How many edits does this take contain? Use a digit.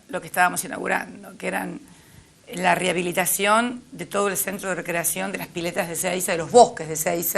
0